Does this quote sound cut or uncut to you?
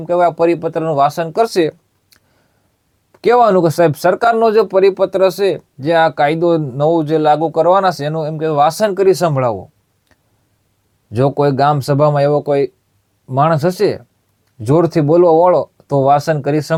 uncut